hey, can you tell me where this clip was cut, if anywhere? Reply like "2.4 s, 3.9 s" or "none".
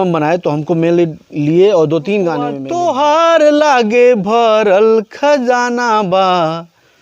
2.6 s